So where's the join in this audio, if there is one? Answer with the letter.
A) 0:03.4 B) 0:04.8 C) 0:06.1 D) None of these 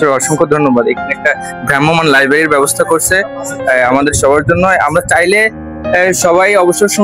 D